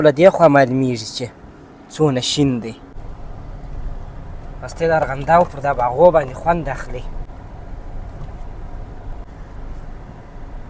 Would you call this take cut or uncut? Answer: cut